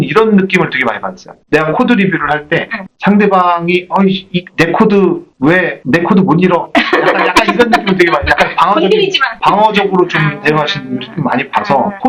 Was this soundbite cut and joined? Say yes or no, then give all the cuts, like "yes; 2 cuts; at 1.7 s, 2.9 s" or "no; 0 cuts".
no; 0 cuts